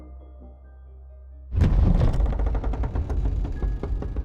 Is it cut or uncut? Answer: cut